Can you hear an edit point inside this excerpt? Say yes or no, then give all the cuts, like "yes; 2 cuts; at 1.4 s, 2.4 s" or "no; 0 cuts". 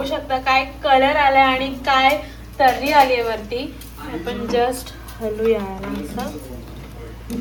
no; 0 cuts